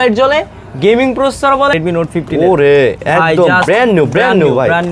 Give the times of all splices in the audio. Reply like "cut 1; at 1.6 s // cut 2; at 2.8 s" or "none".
cut 1; at 1.8 s